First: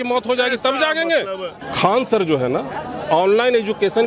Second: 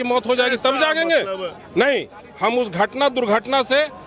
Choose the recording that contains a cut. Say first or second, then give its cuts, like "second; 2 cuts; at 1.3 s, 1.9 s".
first; 1 cut; at 1.6 s